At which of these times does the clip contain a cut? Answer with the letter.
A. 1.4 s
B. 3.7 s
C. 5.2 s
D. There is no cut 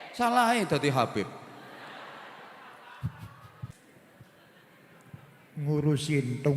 B